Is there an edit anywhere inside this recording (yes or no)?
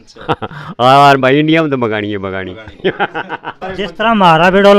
yes